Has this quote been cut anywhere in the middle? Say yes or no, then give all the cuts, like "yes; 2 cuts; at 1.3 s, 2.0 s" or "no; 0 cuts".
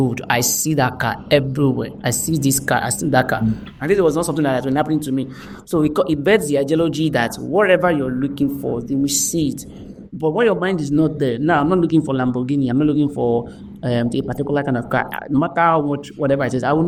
no; 0 cuts